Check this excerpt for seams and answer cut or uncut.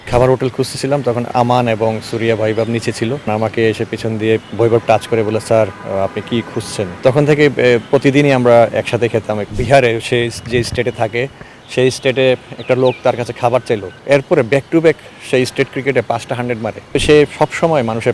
cut